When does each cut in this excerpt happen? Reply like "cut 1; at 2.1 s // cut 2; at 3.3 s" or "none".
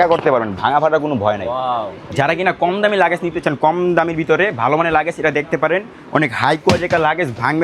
cut 1; at 2.0 s